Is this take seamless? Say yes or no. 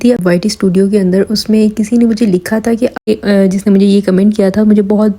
no